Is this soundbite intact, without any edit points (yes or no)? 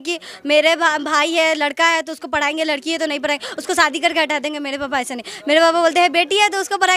yes